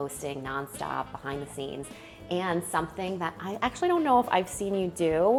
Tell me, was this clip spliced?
no; 0 cuts

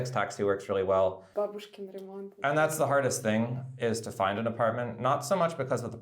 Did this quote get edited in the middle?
yes; 1 cut; at 1.2 s

